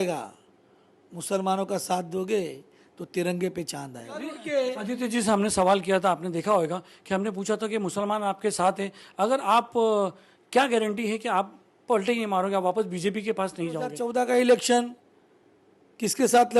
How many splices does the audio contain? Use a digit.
2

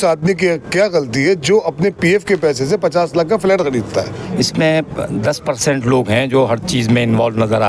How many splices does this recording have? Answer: 1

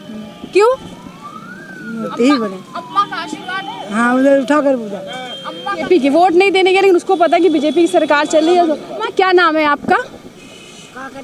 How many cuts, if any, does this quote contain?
2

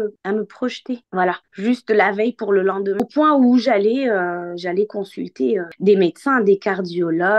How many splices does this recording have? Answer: 1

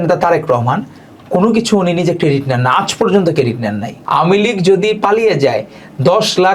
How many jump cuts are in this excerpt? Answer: 1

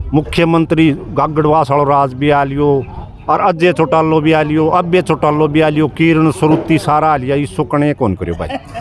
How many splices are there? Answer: 0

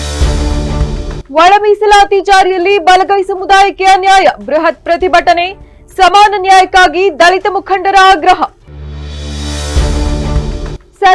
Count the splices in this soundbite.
0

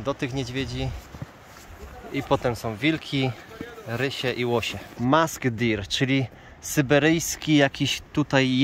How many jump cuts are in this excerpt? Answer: 1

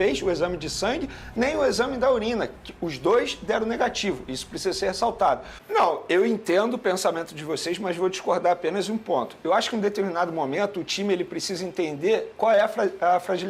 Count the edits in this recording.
1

